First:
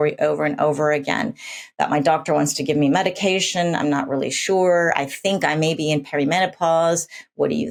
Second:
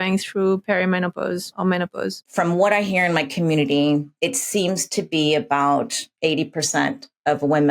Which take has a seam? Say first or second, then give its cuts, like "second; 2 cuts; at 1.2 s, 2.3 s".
second; 4 cuts; at 1.5 s, 2.3 s, 4.1 s, 6.1 s